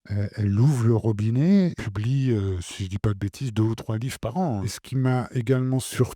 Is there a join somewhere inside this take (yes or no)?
yes